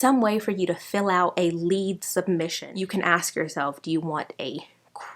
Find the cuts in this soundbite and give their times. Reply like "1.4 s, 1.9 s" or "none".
2.6 s